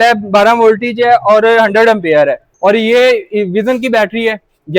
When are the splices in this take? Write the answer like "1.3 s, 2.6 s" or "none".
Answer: 2.5 s